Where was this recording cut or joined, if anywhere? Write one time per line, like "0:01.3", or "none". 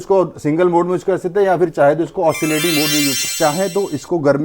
0:03.2